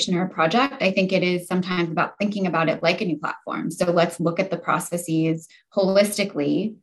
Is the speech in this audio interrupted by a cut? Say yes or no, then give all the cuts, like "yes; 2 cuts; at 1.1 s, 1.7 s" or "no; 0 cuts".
no; 0 cuts